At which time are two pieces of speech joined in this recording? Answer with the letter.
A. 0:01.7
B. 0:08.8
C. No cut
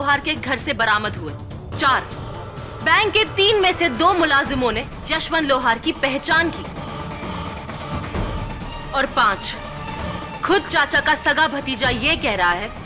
A